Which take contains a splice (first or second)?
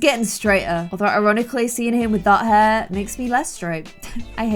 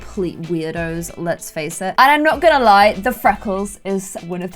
second